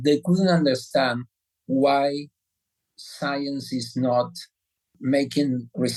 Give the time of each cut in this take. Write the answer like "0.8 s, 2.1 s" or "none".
none